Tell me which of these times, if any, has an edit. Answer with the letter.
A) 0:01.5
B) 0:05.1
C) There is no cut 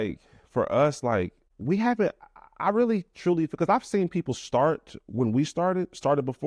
A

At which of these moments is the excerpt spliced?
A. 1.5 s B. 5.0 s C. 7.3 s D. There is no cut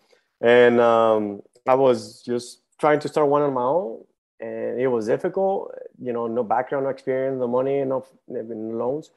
D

